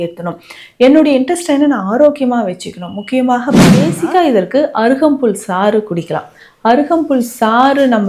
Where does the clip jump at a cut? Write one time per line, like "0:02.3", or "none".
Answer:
0:03.9